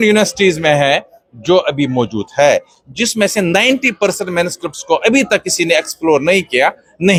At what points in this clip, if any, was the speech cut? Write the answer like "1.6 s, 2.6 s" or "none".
none